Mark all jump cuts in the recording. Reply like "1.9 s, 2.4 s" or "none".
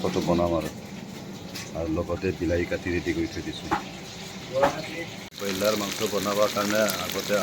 5.2 s